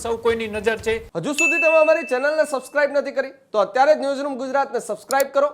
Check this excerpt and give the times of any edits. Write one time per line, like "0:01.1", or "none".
0:01.2